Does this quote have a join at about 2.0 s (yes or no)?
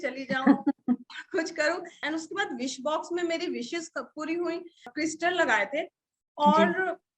yes